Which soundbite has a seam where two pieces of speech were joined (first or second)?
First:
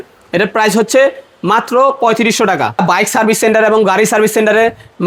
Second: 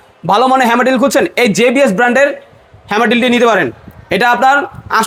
first